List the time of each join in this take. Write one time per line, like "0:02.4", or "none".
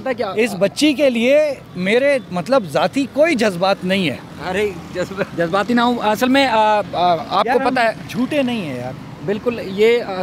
0:01.7
0:04.3
0:05.3